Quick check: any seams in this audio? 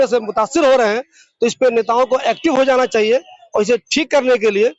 no; 0 cuts

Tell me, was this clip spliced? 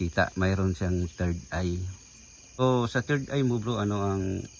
yes; 1 cut; at 2.6 s

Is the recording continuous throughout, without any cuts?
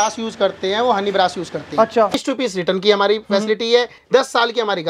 no; 1 cut; at 2.1 s

